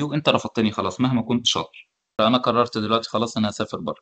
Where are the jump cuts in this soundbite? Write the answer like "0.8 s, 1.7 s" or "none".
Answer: 2.2 s